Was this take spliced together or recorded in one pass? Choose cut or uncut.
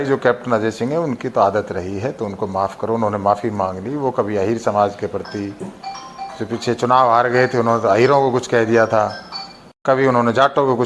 uncut